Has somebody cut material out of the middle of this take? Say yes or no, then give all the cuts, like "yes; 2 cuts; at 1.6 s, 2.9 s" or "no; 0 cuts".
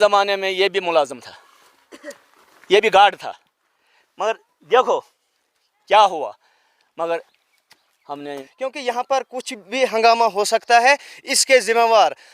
yes; 1 cut; at 8.3 s